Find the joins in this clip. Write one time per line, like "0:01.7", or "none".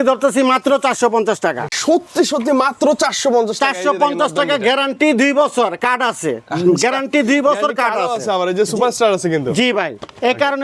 none